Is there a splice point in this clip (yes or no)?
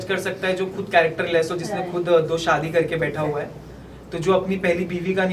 no